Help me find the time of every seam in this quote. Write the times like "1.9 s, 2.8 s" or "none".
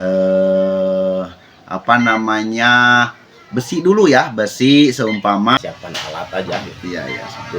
5.6 s

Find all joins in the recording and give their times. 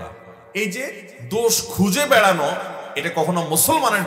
none

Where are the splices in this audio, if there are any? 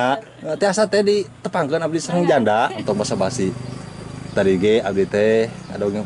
2.8 s

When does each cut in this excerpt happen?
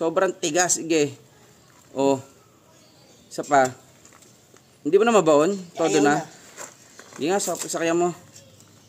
none

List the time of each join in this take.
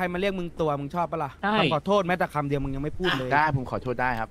1.3 s

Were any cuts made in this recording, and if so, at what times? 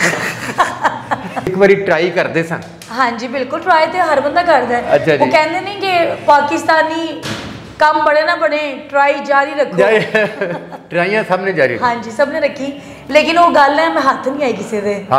1.5 s

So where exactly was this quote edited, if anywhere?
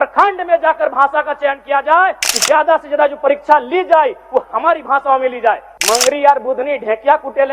2.2 s, 5.7 s

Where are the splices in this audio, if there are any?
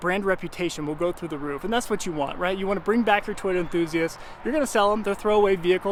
none

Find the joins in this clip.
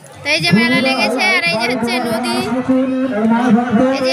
none

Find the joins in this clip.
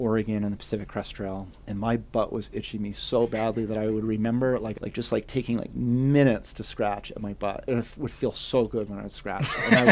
1.5 s, 4.7 s, 7.6 s

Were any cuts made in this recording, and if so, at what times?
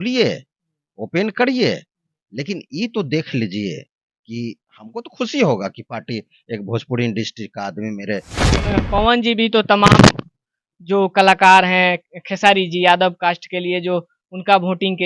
8.6 s

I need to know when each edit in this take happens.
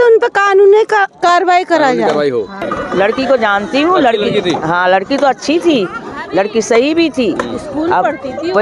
2.8 s

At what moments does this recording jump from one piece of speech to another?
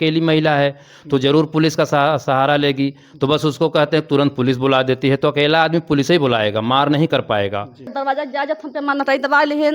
7.9 s

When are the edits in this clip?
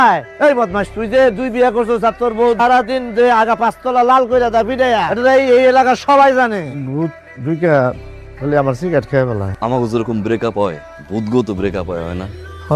6.7 s

